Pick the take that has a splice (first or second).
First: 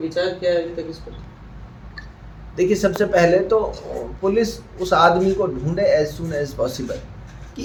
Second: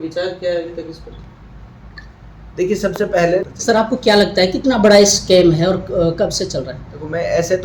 second